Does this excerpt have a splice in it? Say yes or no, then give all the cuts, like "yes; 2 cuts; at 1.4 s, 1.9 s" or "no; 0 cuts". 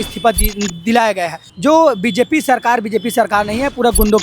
yes; 1 cut; at 1.5 s